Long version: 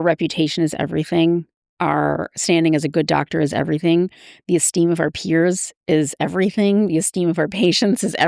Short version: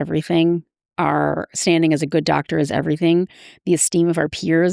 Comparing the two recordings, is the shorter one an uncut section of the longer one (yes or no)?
yes